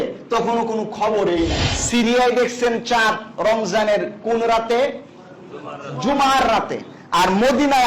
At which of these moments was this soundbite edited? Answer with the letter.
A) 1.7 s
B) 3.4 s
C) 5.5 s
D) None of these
A